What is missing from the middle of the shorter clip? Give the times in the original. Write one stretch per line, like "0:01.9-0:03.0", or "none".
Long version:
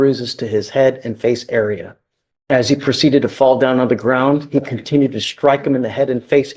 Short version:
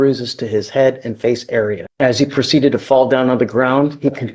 0:01.8-0:02.3